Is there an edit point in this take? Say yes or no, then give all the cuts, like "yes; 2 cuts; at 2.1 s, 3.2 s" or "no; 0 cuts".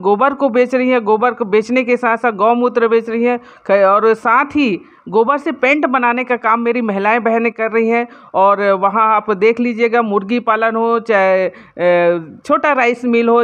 no; 0 cuts